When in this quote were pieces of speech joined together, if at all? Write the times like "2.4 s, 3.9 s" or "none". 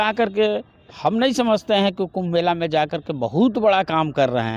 none